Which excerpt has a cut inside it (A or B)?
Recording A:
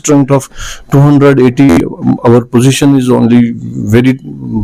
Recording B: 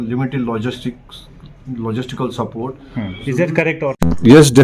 B